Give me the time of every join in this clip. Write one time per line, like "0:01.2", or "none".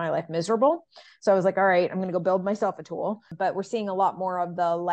0:03.3